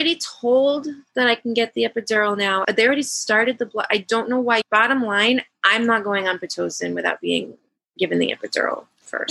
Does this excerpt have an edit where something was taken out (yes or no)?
no